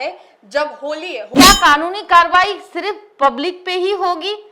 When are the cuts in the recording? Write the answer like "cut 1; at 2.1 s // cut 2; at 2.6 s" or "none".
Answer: cut 1; at 1.3 s